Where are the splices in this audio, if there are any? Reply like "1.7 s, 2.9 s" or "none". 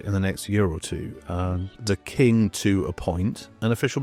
none

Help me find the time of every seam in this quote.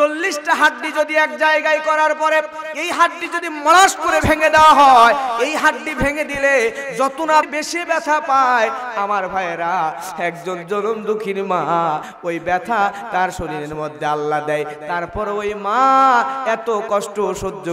7.5 s, 12.1 s

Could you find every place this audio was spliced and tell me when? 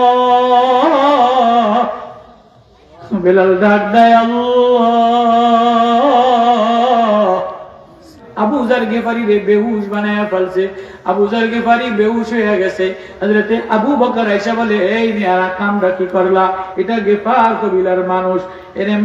8.2 s

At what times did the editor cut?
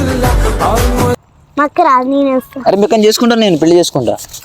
1.2 s

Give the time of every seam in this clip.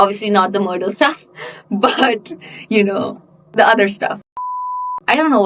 4.4 s

